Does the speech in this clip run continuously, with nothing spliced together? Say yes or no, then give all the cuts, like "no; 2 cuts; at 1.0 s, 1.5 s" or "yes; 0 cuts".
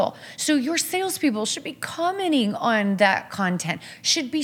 yes; 0 cuts